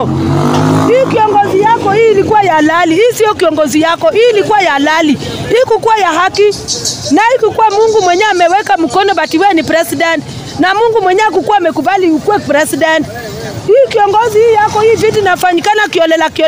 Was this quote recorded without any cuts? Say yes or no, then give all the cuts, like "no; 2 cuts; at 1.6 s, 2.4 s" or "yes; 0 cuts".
yes; 0 cuts